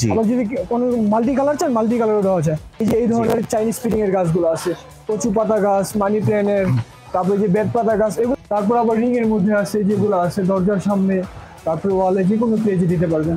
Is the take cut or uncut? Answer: cut